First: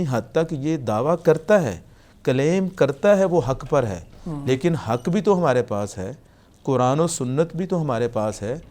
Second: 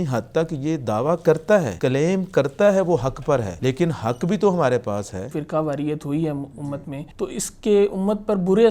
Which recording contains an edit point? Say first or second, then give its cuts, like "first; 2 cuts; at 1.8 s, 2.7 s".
second; 4 cuts; at 1.7 s, 3.5 s, 5.4 s, 7.0 s